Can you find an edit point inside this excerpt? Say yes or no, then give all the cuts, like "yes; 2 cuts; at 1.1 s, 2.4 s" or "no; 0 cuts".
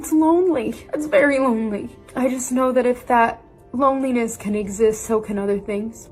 no; 0 cuts